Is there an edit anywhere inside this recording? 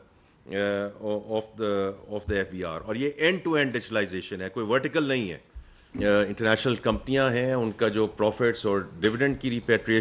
yes; 1 cut; at 5.8 s

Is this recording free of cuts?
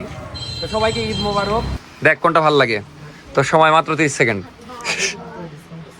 no; 1 cut; at 1.8 s

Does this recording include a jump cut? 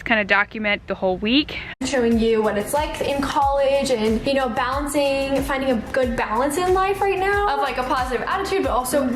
yes; 1 cut; at 1.8 s

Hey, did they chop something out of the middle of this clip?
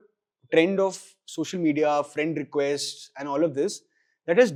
no; 0 cuts

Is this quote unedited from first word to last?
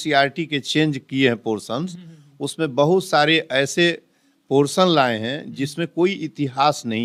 yes; 0 cuts

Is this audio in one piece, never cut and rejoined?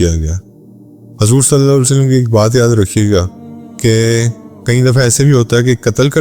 yes; 0 cuts

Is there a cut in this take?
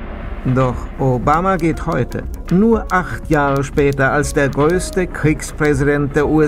yes; 1 cut; at 4.5 s

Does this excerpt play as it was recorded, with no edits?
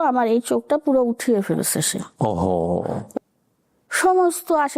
no; 1 cut; at 3.1 s

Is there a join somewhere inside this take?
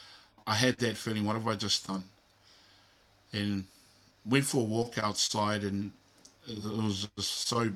no; 0 cuts

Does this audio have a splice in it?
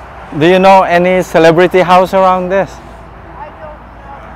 no; 0 cuts

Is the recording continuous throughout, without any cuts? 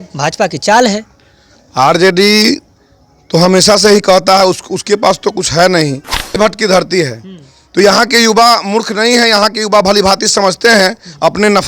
no; 1 cut; at 6.4 s

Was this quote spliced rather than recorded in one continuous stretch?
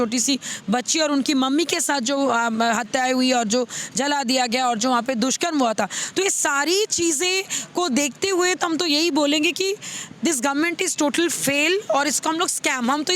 no; 0 cuts

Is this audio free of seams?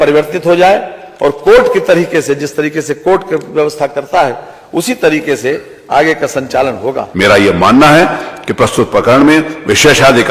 no; 1 cut; at 7.0 s

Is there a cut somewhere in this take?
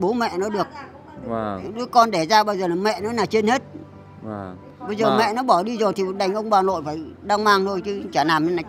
no; 0 cuts

